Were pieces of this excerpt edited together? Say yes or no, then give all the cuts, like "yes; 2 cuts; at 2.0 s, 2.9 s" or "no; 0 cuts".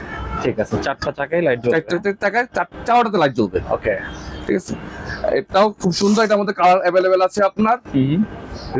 no; 0 cuts